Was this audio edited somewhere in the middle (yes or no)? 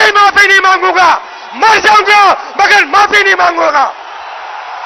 no